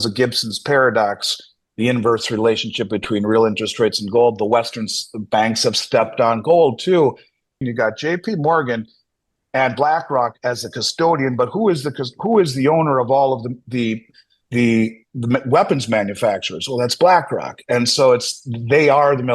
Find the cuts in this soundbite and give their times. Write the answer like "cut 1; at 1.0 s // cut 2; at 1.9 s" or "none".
cut 1; at 7.6 s